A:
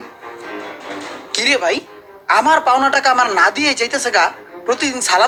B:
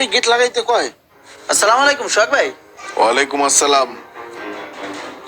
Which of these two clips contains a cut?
B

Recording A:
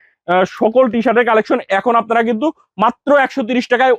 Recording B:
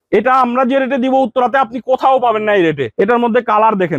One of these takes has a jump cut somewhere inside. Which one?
B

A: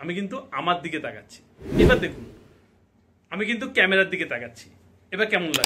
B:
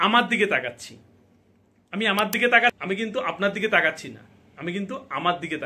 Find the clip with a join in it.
B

